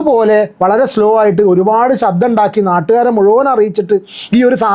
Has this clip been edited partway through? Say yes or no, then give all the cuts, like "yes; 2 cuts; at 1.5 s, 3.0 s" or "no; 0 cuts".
no; 0 cuts